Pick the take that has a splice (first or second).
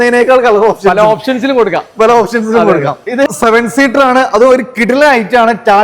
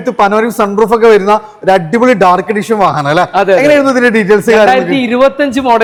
first